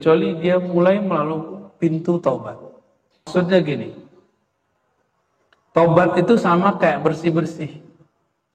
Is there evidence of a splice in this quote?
yes; 1 cut; at 3.3 s

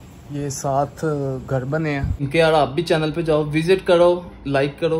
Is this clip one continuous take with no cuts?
no; 1 cut; at 2.3 s

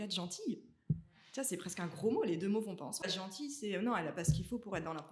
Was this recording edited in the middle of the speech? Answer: yes; 1 cut; at 3.0 s

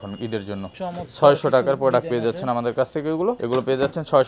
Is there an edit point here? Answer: yes; 2 cuts; at 0.8 s, 3.4 s

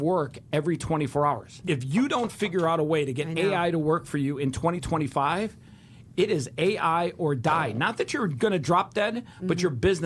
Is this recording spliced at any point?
yes; 1 cut; at 1.5 s

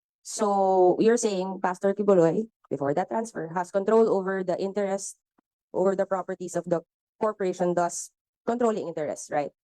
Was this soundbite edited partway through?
no; 0 cuts

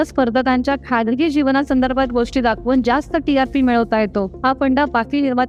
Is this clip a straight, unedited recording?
yes; 0 cuts

